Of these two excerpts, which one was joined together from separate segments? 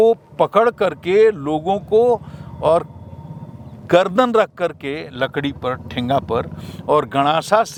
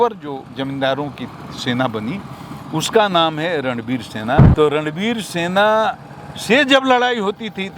second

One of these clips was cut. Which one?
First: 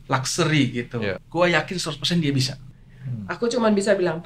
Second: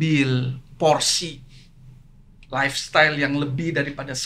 first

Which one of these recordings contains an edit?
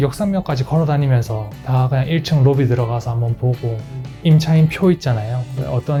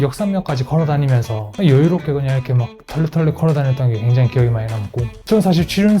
second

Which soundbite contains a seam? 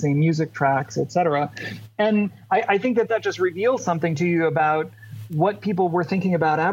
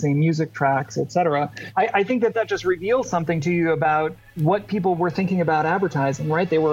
second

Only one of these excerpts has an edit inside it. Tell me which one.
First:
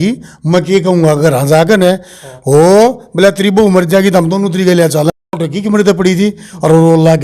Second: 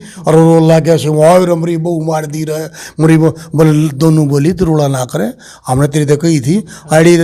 first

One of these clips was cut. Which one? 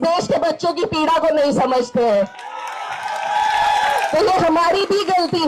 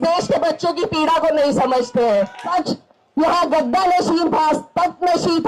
second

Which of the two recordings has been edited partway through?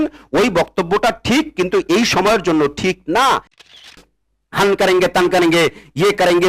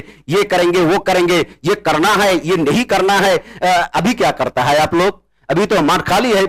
first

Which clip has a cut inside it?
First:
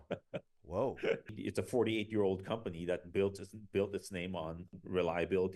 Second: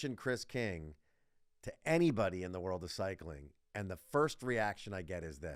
first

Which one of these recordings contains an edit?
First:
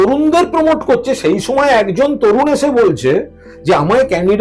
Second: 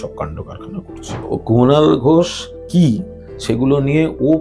second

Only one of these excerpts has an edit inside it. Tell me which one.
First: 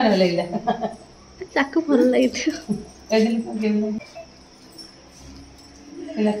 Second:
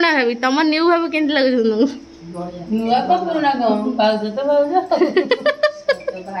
first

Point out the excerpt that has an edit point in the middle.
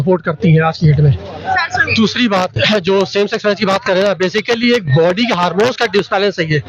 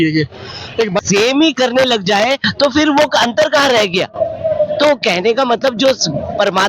second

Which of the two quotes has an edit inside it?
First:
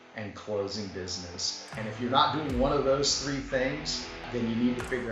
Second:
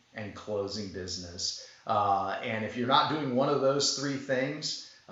first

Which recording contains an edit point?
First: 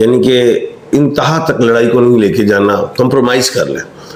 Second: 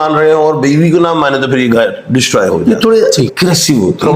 second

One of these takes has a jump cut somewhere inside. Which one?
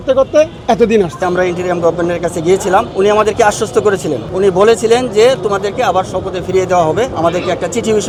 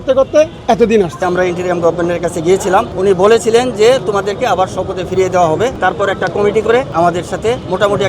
second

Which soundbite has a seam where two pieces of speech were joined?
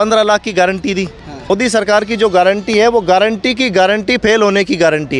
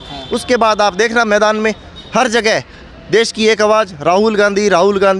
first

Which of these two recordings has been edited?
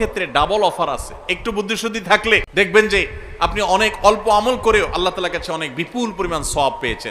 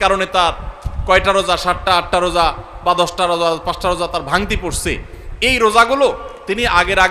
first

